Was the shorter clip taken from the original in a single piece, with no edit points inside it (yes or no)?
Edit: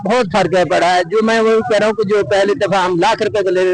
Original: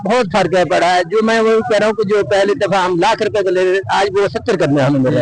yes